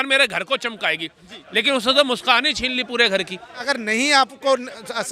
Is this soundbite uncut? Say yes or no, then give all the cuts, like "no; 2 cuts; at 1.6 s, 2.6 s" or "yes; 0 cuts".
no; 1 cut; at 3.7 s